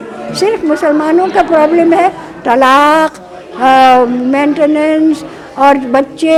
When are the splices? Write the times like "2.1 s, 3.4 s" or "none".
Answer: none